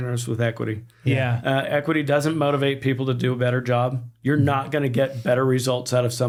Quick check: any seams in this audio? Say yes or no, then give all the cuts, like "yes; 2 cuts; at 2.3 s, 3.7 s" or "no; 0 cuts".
no; 0 cuts